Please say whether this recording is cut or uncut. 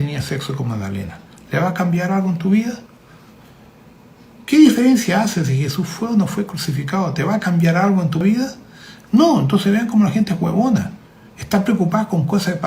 cut